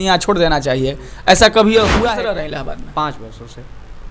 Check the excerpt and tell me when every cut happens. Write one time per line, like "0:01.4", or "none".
0:02.0